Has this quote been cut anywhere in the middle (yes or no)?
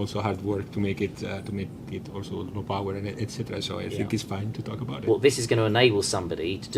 yes